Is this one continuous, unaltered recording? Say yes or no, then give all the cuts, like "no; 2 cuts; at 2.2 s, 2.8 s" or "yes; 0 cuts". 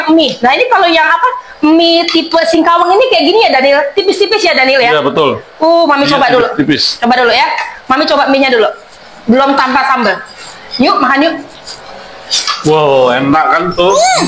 yes; 0 cuts